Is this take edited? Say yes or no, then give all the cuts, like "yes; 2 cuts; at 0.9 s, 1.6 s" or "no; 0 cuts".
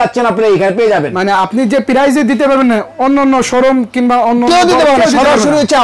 no; 0 cuts